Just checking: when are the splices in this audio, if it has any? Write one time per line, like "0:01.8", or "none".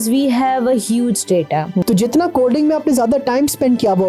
0:01.8